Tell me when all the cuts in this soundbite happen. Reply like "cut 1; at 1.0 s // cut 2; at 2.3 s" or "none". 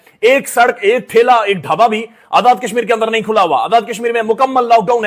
none